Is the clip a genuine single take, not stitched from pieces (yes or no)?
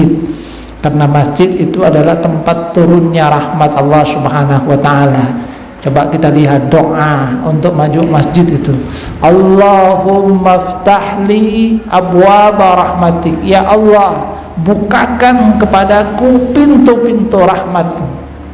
yes